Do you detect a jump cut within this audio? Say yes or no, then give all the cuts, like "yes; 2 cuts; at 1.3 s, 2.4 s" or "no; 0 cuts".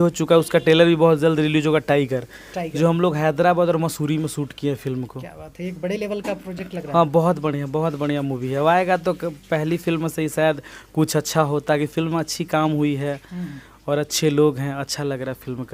no; 0 cuts